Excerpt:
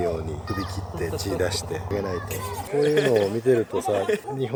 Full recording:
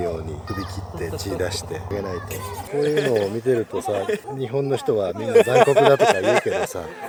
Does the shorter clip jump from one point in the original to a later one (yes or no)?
no